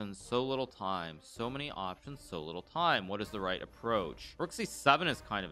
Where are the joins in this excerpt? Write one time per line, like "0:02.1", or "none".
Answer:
0:04.2